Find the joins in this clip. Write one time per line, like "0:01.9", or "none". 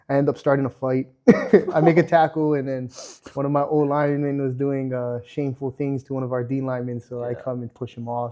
none

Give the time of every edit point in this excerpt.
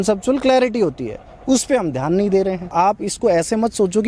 0:02.7

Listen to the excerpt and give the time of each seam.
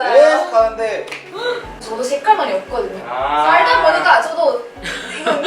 0:01.7

